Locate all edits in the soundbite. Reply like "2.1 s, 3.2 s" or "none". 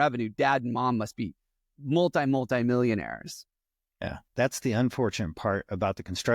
4.2 s